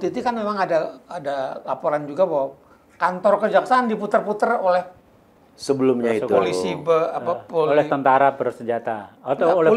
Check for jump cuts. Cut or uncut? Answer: uncut